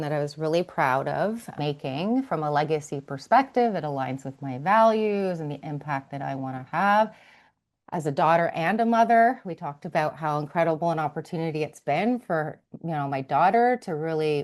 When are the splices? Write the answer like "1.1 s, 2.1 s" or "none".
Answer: 1.5 s